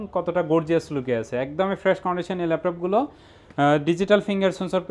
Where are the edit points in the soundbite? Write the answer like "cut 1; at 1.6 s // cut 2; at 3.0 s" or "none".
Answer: none